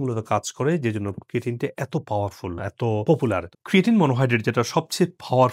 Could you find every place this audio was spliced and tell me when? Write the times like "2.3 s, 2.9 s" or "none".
3.5 s